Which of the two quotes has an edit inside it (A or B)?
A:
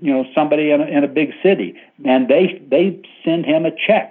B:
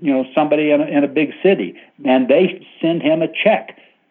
B